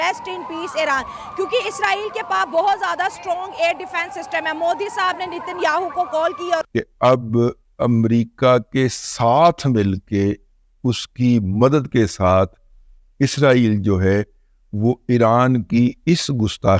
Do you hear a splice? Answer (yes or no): no